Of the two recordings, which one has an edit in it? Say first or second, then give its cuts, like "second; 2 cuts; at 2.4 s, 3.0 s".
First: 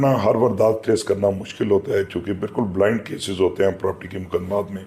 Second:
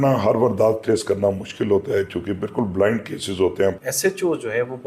second; 1 cut; at 3.8 s